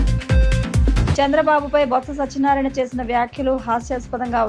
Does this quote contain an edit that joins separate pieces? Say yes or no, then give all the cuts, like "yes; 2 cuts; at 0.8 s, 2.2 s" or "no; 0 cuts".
yes; 1 cut; at 1.0 s